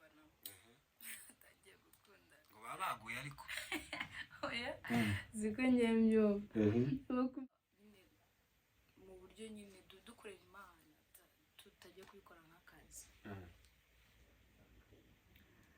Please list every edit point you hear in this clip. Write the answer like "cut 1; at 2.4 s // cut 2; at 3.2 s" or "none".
cut 1; at 7.3 s

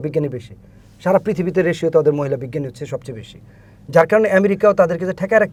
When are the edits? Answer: none

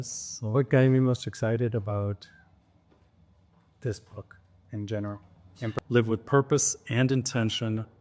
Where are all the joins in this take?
cut 1; at 5.8 s

